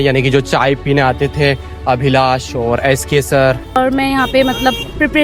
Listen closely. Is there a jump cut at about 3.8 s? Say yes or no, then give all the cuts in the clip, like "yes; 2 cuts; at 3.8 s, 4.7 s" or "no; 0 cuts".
yes; 1 cut; at 3.8 s